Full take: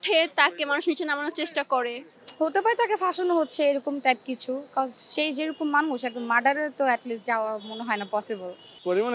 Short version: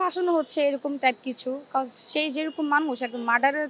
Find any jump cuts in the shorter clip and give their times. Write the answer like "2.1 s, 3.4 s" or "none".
none